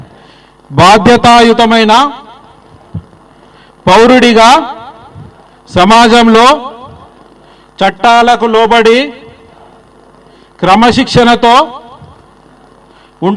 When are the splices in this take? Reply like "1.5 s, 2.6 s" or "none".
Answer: none